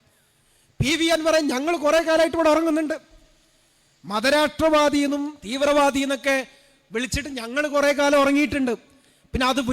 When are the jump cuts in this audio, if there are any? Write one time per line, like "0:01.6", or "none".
0:05.4